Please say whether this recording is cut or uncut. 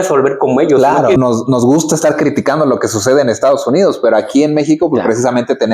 cut